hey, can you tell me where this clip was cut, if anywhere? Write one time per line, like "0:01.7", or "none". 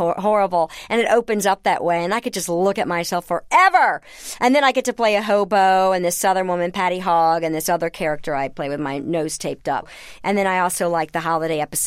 0:09.9

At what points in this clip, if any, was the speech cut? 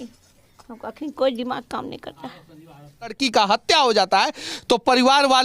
0:03.2

